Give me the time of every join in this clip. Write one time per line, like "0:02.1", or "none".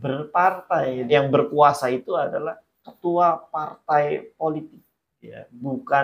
0:01.1